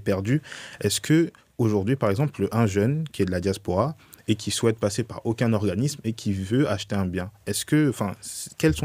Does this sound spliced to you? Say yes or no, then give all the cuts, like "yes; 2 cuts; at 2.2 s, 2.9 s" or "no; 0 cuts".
no; 0 cuts